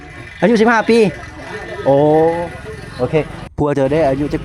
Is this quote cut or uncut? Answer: uncut